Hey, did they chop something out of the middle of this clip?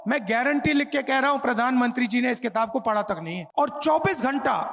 yes; 1 cut; at 3.4 s

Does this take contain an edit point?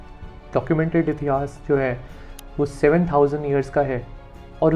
no; 0 cuts

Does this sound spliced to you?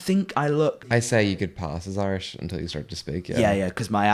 yes; 1 cut; at 1.0 s

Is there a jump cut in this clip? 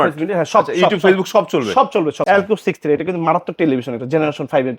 yes; 1 cut; at 2.2 s

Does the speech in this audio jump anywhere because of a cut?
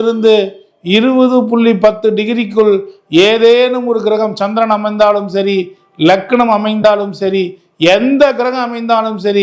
no; 0 cuts

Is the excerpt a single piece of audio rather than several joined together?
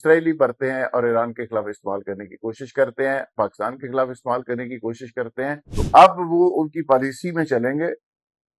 no; 1 cut; at 5.7 s

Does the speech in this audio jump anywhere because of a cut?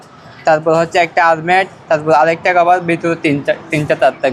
no; 0 cuts

